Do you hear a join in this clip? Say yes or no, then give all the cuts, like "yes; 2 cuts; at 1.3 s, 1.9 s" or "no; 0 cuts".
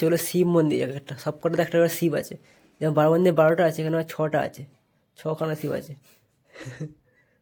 no; 0 cuts